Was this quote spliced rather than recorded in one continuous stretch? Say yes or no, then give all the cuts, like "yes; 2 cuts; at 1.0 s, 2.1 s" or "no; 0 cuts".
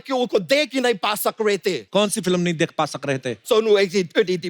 yes; 2 cuts; at 1.8 s, 3.4 s